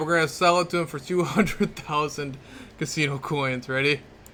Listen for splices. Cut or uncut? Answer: uncut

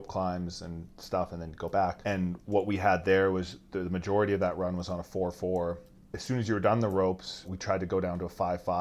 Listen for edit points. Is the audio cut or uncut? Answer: cut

